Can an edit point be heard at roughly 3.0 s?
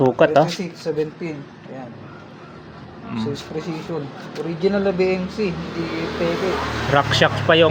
no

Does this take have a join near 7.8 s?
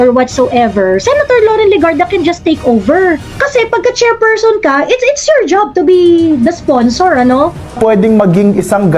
yes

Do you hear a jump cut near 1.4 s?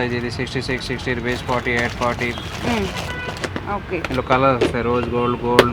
no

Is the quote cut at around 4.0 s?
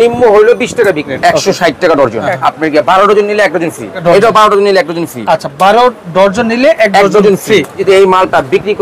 yes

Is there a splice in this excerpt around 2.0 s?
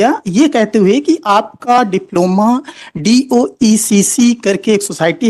no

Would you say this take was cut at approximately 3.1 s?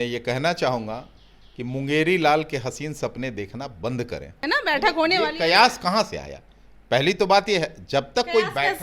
no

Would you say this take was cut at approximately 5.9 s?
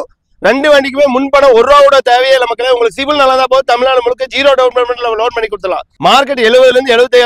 yes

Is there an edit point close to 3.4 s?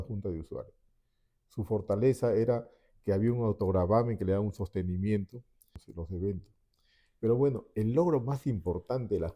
no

